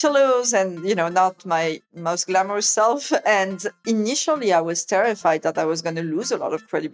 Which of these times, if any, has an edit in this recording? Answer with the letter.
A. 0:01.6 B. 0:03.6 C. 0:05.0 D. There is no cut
A